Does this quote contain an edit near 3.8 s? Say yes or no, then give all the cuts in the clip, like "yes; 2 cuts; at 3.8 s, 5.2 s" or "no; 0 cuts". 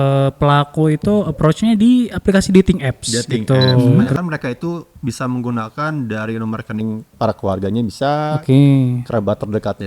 yes; 1 cut; at 3.8 s